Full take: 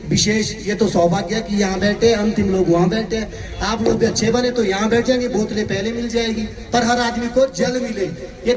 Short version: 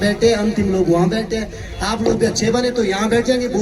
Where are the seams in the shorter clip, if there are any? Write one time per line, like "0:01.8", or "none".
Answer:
none

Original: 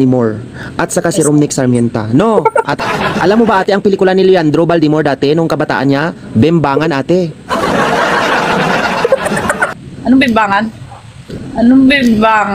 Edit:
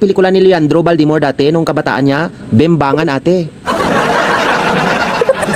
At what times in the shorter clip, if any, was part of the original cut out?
none

